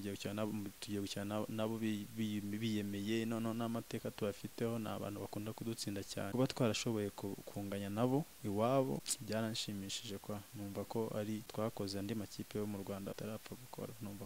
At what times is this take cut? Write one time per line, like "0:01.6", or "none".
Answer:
0:06.3
0:09.1
0:11.5
0:13.2